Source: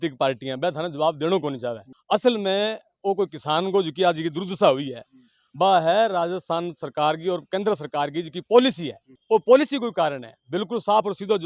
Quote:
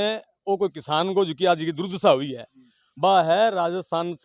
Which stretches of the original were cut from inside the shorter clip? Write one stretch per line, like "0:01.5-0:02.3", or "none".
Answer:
none